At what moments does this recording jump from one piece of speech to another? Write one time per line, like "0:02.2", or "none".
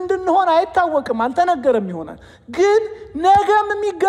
none